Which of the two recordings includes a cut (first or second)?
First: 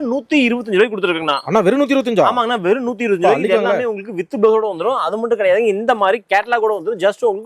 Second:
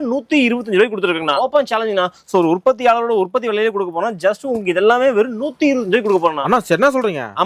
second